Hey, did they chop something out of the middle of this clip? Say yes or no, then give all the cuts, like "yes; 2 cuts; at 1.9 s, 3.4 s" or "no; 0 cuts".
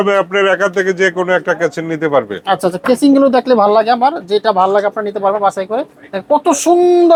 no; 0 cuts